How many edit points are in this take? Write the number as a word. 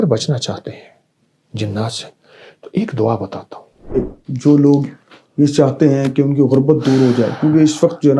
one